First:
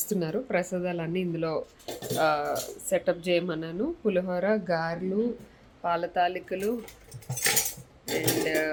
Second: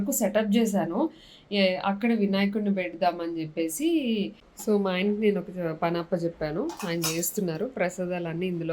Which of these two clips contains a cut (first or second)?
second